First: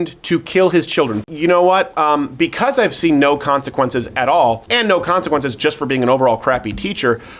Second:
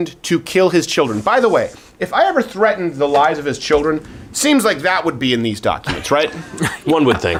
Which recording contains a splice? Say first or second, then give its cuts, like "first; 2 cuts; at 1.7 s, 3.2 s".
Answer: first; 2 cuts; at 1.2 s, 4.6 s